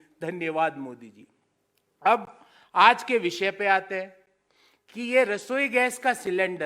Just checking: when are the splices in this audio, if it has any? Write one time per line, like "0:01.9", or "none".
none